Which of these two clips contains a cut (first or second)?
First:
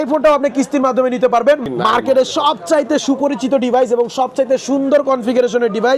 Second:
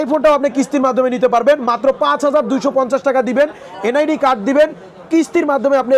first